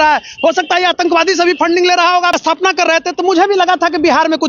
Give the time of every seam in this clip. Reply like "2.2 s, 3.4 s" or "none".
2.4 s